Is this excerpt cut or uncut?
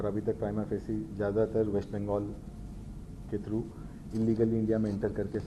uncut